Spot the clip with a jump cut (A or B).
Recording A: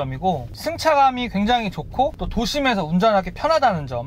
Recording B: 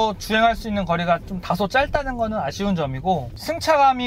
A